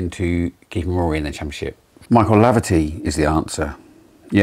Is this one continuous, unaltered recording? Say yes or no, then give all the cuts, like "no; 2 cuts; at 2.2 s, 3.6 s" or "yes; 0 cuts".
no; 1 cut; at 1.9 s